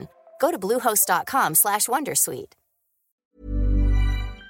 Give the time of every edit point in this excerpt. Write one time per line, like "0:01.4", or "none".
0:03.2